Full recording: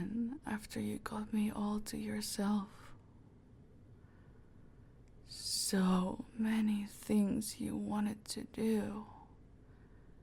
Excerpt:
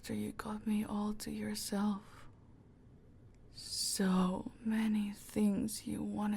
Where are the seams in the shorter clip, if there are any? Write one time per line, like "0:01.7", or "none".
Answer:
0:03.3